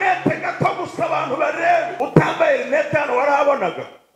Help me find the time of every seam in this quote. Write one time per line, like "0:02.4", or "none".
0:01.9